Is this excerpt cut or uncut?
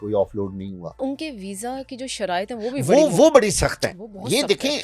cut